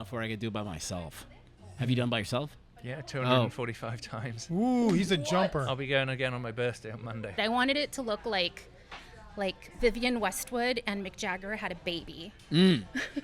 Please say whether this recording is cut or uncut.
cut